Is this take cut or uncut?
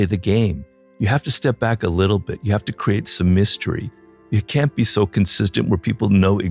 uncut